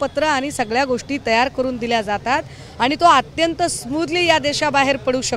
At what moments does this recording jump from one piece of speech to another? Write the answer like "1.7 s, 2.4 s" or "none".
none